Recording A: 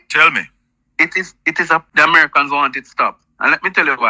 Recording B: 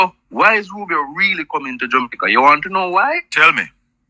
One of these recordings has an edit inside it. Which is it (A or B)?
A